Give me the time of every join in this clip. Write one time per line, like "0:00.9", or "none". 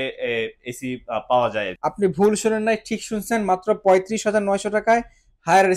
0:01.7